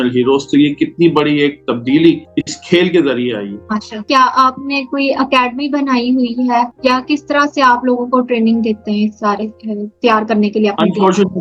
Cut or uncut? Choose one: uncut